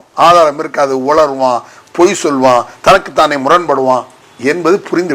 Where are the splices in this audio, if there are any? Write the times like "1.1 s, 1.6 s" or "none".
4.2 s